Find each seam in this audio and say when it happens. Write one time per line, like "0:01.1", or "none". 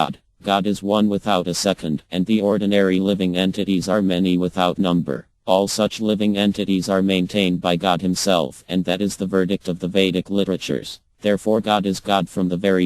0:11.0